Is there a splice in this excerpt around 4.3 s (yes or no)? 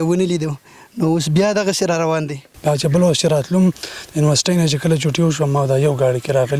no